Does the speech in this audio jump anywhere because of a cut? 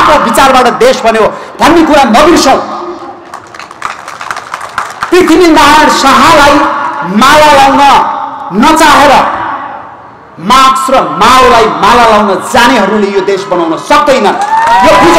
no; 0 cuts

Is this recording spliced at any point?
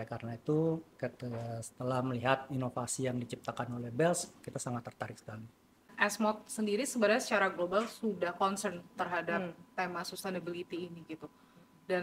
yes; 1 cut; at 5.9 s

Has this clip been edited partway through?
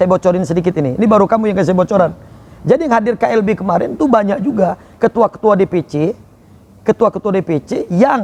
no; 0 cuts

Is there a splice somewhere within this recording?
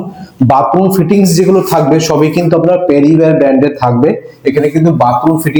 no; 0 cuts

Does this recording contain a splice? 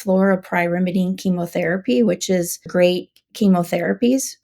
yes; 1 cut; at 2.7 s

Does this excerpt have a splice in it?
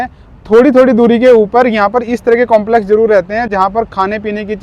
no; 0 cuts

